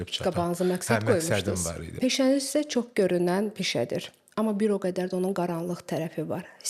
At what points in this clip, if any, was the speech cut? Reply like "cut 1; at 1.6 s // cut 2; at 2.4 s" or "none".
cut 1; at 1.9 s